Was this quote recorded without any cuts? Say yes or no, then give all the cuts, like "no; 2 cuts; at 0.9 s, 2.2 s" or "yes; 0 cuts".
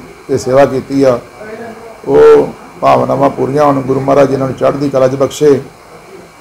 yes; 0 cuts